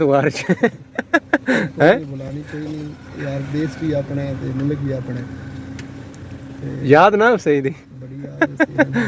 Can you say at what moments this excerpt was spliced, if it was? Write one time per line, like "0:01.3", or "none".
none